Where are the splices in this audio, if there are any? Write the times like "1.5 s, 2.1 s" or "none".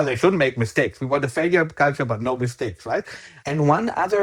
3.2 s

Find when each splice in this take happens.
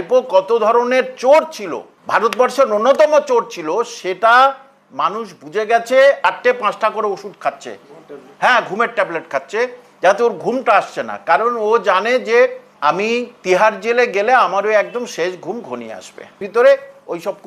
6.2 s, 12.7 s, 16.4 s

